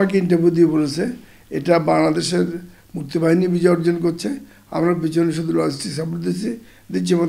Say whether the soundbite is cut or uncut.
uncut